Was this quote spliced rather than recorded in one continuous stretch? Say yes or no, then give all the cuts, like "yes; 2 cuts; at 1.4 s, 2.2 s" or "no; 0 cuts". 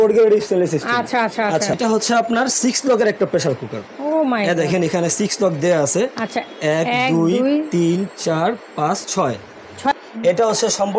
yes; 2 cuts; at 1.8 s, 9.9 s